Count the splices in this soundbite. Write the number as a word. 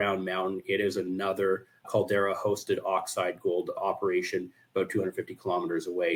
zero